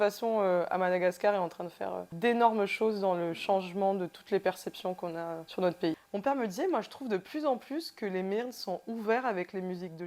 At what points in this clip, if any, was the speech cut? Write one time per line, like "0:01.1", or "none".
0:02.1
0:05.4
0:06.0

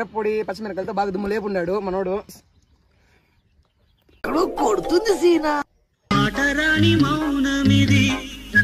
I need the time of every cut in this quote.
0:02.4

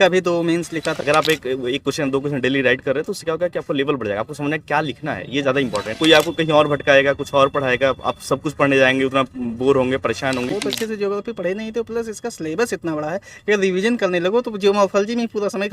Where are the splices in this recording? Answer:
0:01.0
0:05.9
0:10.5

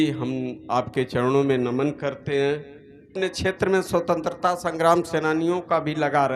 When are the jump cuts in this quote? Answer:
0:03.1

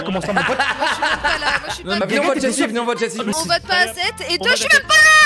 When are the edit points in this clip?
0:02.0

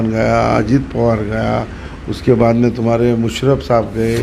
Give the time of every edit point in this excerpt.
none

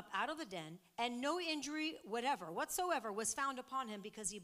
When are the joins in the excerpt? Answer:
none

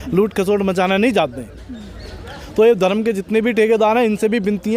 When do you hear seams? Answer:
none

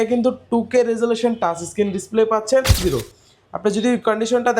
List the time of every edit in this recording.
0:02.8

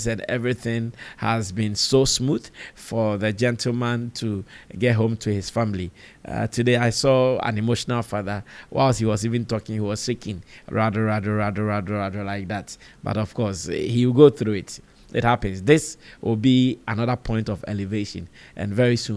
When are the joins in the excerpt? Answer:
none

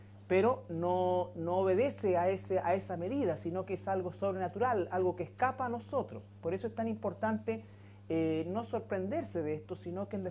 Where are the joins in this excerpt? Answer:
none

